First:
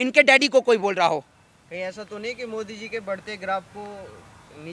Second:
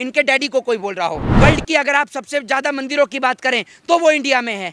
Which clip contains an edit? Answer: second; 1 cut; at 1.3 s

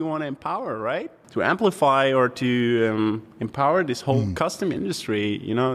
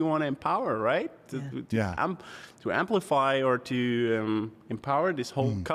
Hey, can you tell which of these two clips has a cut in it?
first; 1 cut; at 1.2 s

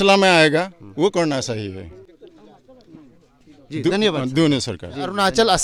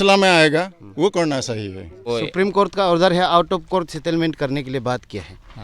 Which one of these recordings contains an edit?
second; 1 cut; at 2.1 s

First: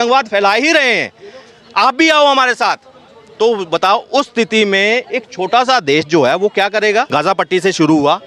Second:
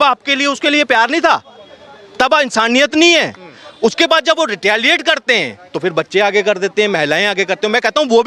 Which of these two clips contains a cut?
first; 1 cut; at 7.1 s

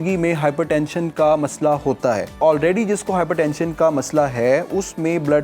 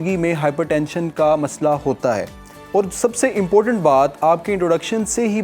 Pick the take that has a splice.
first; 1 cut; at 2.4 s

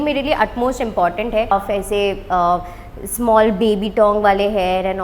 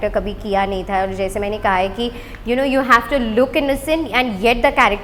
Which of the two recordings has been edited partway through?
first; 1 cut; at 1.5 s

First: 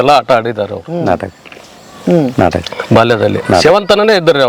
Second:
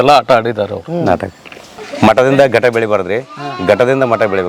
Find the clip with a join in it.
second; 1 cut; at 1.8 s

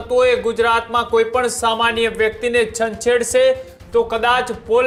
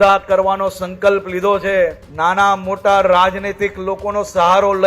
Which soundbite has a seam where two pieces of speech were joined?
second; 1 cut; at 2.0 s

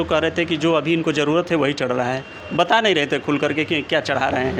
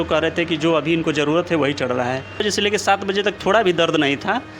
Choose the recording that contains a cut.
second; 1 cut; at 2.4 s

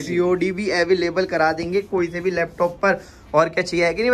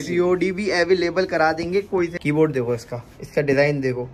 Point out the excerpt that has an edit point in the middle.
second; 1 cut; at 2.1 s

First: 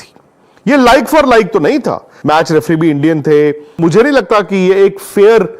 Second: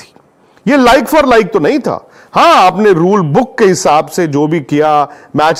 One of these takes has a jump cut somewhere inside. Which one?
first; 2 cuts; at 2.1 s, 3.8 s

